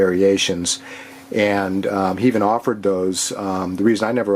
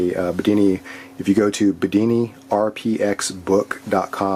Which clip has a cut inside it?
first; 1 cut; at 1.7 s

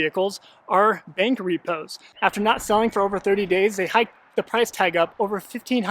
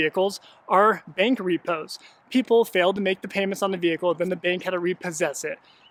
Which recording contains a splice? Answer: first; 1 cut; at 2.0 s

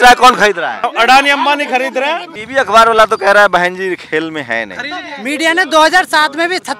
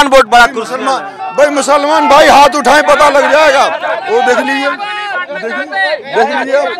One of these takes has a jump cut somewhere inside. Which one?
first; 3 cuts; at 0.8 s, 2.4 s, 5.1 s

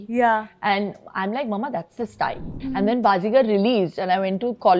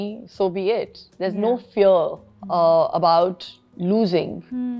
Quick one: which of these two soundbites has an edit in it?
first; 1 cut; at 2.5 s

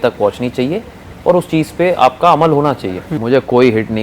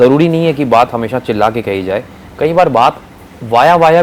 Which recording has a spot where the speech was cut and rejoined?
first; 1 cut; at 3.1 s

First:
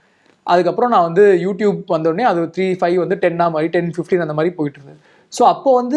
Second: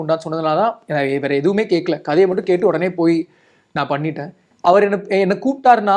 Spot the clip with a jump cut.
second; 1 cut; at 4.4 s

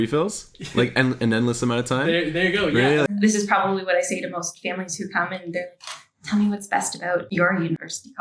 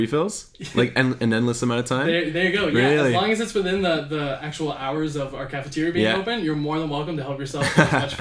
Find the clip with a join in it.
first; 1 cut; at 3.1 s

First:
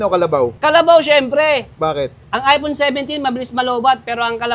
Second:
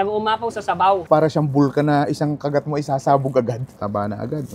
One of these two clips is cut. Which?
second; 2 cuts; at 1.0 s, 3.6 s

